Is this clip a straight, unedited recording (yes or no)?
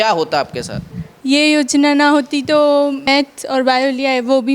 no